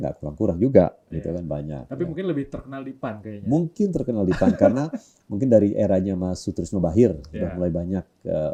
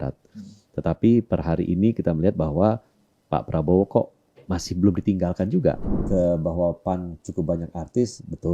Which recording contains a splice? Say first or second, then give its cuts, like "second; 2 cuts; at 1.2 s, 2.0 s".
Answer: second; 1 cut; at 6.0 s